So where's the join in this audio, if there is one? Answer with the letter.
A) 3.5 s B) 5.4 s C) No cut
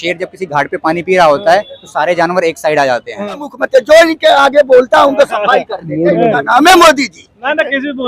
A